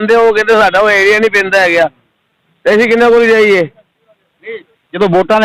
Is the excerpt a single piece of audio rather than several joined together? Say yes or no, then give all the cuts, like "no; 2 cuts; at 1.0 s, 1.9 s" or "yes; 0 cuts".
yes; 0 cuts